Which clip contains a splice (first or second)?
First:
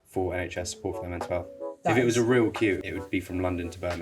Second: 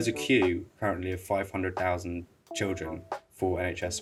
first